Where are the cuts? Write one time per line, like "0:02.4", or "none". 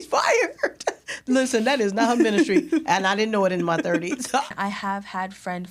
0:01.1
0:04.4